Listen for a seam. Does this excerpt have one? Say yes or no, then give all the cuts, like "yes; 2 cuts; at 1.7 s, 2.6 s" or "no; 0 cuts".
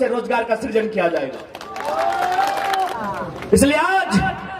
yes; 1 cut; at 3.0 s